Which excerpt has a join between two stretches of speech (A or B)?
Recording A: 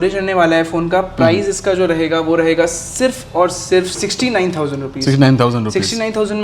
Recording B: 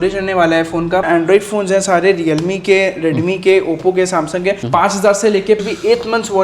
B